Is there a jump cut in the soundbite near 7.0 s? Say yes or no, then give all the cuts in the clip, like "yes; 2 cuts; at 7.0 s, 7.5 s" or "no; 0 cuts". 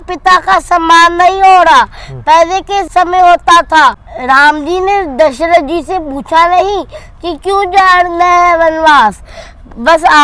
no; 2 cuts; at 2.9 s, 4.1 s